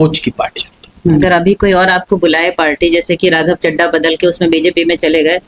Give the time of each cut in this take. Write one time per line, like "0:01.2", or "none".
0:01.2